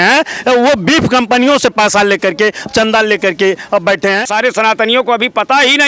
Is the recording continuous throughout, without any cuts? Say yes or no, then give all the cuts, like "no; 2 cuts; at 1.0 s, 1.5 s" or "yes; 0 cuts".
no; 1 cut; at 4.3 s